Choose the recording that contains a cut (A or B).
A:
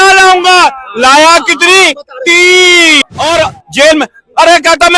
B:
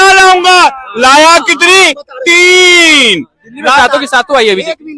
A